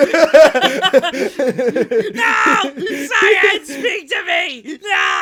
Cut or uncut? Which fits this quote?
uncut